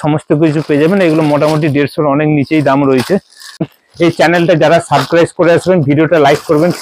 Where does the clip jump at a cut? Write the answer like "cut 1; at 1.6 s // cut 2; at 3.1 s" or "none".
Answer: cut 1; at 3.6 s